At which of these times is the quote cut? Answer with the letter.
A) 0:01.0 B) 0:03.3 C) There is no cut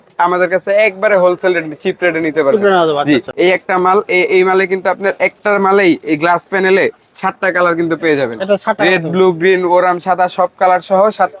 B